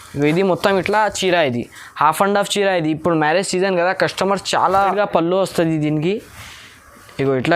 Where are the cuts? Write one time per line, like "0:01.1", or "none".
0:04.9